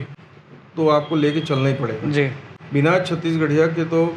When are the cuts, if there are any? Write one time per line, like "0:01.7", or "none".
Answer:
none